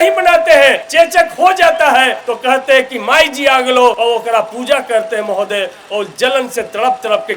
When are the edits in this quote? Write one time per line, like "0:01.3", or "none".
0:00.8
0:02.2
0:04.0